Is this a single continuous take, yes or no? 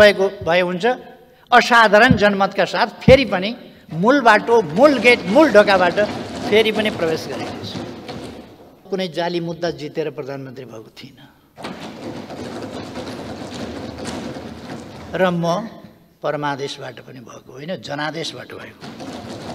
no